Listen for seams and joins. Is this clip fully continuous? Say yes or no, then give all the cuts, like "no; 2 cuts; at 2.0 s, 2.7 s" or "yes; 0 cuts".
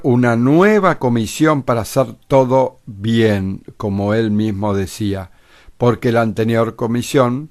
no; 1 cut; at 3.7 s